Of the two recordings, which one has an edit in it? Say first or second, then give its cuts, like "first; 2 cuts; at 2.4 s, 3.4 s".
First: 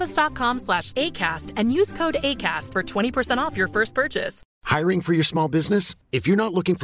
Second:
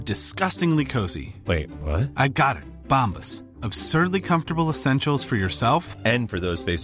first; 1 cut; at 4.5 s